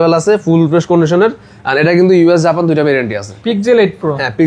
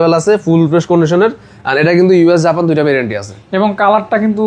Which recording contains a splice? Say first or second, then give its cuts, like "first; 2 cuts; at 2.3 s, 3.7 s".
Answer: first; 1 cut; at 3.3 s